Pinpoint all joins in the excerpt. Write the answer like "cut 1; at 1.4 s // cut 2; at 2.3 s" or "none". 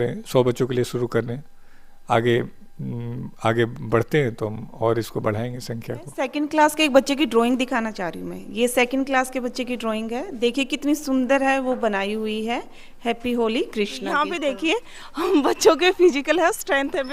cut 1; at 6.4 s // cut 2; at 14.3 s